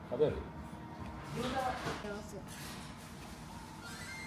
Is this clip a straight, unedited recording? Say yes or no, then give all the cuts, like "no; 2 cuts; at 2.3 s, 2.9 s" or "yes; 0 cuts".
yes; 0 cuts